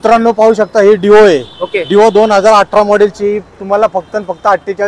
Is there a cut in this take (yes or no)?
no